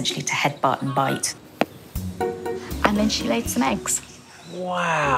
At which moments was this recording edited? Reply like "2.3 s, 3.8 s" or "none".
1.4 s, 2.9 s